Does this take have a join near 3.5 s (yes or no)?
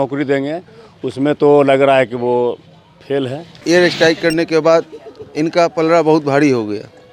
yes